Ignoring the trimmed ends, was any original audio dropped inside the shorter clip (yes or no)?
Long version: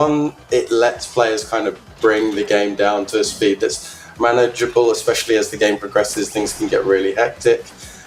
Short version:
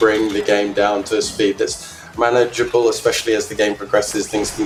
no